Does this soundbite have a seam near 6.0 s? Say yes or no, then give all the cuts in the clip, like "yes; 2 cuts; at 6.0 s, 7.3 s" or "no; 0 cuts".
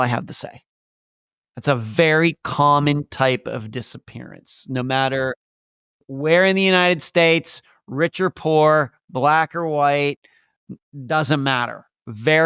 yes; 1 cut; at 6.0 s